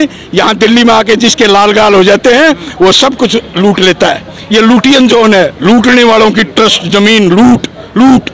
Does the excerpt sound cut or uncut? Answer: uncut